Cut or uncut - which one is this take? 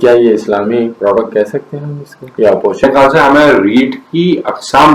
cut